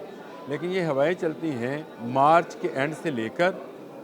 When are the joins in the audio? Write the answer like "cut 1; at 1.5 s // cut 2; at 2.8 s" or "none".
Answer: cut 1; at 1.9 s

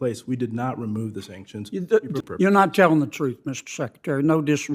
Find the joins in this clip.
cut 1; at 2.2 s

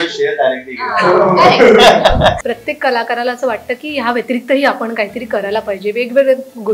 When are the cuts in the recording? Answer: cut 1; at 2.4 s

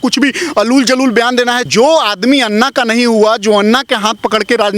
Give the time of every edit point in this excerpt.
cut 1; at 1.6 s

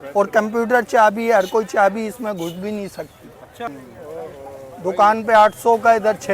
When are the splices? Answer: cut 1; at 3.6 s

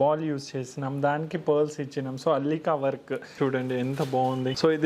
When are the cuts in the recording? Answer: cut 1; at 3.3 s

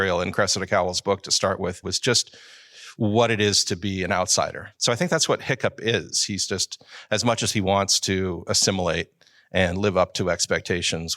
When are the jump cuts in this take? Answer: cut 1; at 1.9 s // cut 2; at 4.7 s

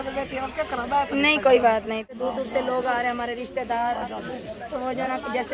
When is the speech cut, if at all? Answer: cut 1; at 2.1 s

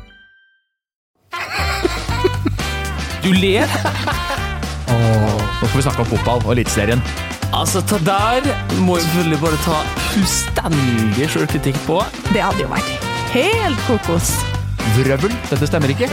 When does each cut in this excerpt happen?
cut 1; at 1.0 s

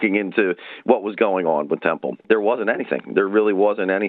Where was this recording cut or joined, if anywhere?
cut 1; at 2.2 s

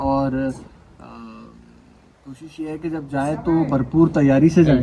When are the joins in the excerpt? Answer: none

